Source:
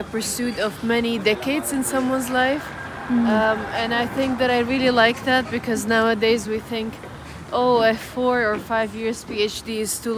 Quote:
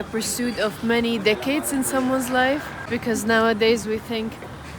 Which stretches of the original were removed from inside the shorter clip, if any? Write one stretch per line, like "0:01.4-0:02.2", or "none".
0:02.9-0:05.5